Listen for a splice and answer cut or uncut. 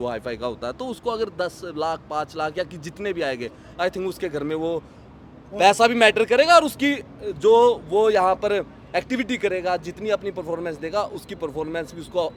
uncut